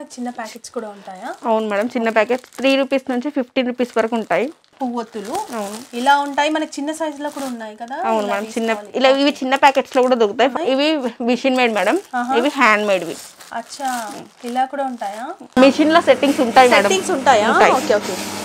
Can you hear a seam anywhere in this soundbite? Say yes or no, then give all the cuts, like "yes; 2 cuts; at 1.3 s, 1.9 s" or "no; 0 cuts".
yes; 3 cuts; at 4.6 s, 10.5 s, 15.5 s